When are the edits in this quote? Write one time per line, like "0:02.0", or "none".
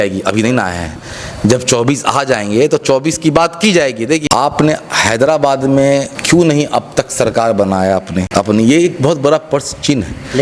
0:04.2
0:06.1
0:08.2